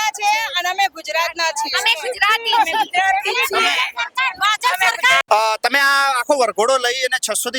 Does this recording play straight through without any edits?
yes; 0 cuts

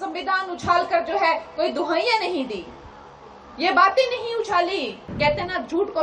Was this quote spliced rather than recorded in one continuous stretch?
yes; 1 cut; at 5.0 s

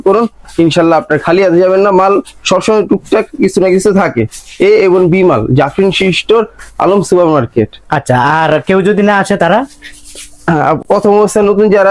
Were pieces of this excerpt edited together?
no; 0 cuts

